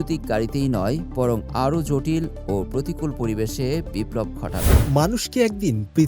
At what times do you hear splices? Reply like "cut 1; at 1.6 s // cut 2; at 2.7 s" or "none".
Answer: cut 1; at 4.8 s

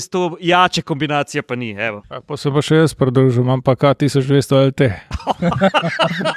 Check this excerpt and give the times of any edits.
cut 1; at 2.0 s

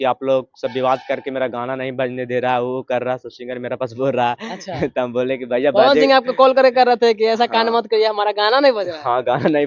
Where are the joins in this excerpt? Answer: none

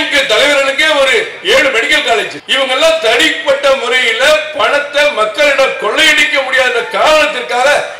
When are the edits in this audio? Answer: cut 1; at 2.4 s

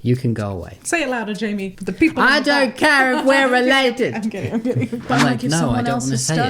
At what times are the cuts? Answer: cut 1; at 5.0 s

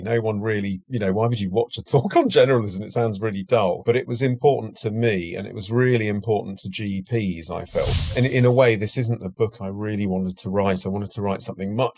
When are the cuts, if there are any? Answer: cut 1; at 8.0 s

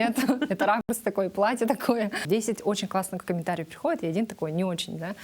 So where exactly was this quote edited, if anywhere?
cut 1; at 2.2 s

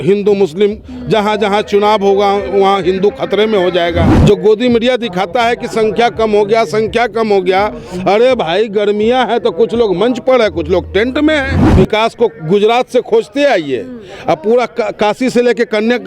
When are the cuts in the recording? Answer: cut 1; at 4.1 s // cut 2; at 11.6 s

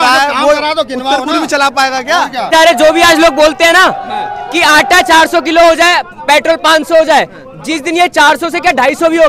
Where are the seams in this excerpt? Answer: cut 1; at 2.5 s

